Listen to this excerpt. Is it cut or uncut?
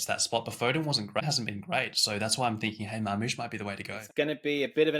cut